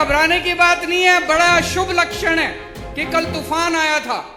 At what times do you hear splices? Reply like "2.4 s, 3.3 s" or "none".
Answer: none

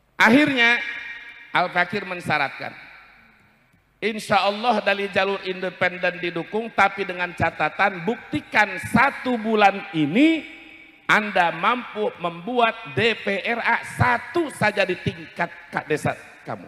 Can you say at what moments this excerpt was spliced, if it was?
none

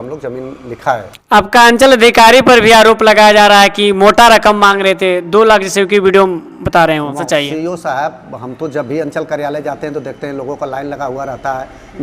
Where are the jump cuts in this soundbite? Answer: 1.1 s, 7.2 s

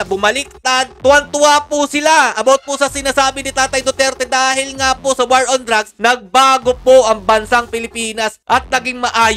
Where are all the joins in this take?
none

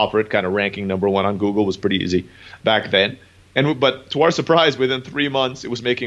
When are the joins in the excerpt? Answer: none

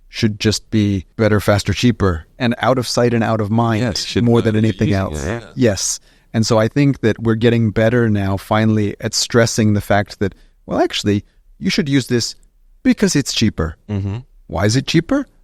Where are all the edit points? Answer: 1.1 s, 2.3 s

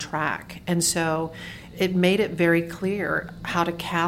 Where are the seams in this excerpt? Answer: 1.6 s

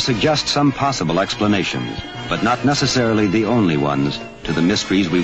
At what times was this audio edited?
1.9 s

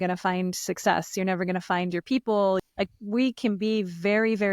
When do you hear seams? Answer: 2.6 s

